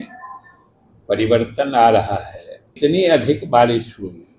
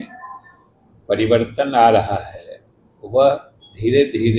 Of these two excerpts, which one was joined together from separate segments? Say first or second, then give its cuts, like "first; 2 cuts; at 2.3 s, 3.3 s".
first; 1 cut; at 2.7 s